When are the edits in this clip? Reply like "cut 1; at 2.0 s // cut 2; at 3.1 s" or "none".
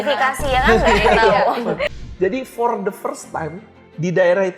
cut 1; at 1.9 s